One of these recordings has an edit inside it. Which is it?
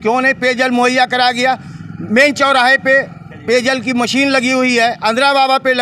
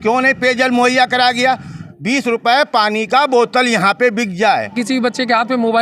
second; 2 cuts; at 1.9 s, 4.7 s

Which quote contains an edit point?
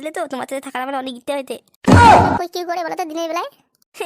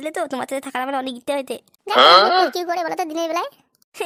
first; 2 cuts; at 1.7 s, 2.5 s

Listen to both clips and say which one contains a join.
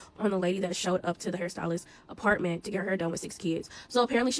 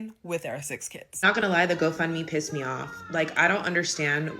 second; 1 cut; at 1.1 s

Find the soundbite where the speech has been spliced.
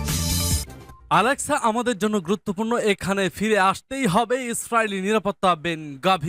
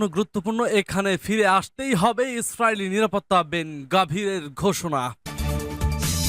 second; 1 cut; at 5.2 s

